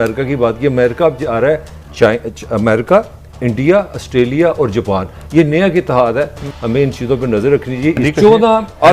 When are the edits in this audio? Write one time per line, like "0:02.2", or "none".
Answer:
0:06.5
0:08.0